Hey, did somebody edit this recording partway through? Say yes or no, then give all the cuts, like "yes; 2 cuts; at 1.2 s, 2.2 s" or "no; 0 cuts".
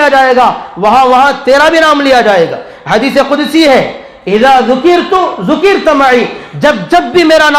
no; 0 cuts